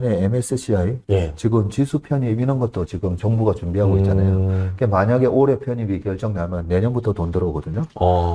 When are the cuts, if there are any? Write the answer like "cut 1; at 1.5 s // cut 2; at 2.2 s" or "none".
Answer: none